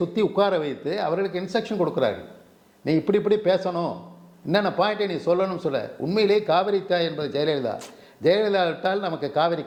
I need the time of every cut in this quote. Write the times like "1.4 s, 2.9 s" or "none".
none